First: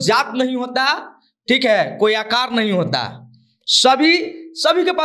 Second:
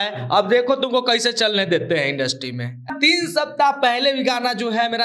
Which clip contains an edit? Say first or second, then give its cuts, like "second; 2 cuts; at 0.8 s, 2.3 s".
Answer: second; 1 cut; at 2.9 s